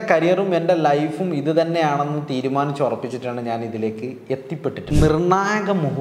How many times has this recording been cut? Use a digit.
1